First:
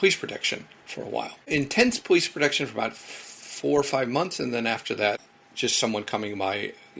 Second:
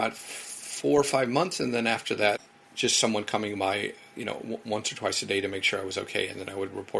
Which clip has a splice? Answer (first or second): first